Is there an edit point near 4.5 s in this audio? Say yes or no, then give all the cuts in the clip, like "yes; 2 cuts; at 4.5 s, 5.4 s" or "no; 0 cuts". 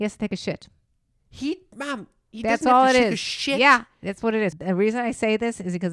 yes; 1 cut; at 4.5 s